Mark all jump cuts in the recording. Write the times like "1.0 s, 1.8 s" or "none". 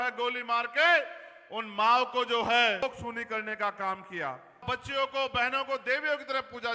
2.8 s, 4.6 s